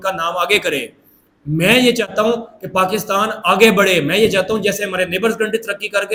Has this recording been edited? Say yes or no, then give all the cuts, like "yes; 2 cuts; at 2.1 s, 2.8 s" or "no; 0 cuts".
no; 0 cuts